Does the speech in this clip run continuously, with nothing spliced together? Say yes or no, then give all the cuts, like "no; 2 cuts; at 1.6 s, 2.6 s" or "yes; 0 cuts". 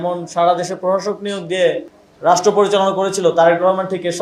yes; 0 cuts